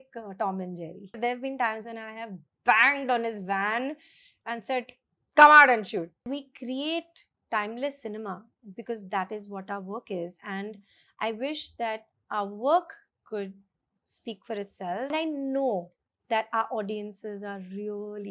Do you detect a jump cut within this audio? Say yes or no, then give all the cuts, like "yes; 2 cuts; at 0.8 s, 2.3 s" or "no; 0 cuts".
yes; 3 cuts; at 1.2 s, 6.3 s, 15.1 s